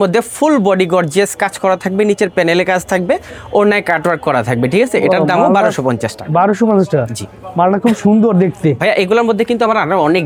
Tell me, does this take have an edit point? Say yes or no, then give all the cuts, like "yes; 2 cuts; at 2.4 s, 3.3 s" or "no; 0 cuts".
no; 0 cuts